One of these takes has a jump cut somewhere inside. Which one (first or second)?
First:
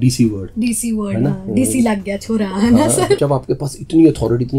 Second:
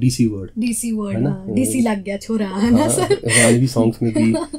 first